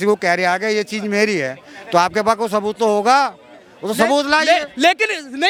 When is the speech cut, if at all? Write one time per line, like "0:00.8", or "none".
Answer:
none